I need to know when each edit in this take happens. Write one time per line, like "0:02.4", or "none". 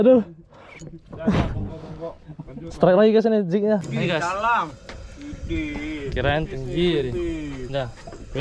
0:03.9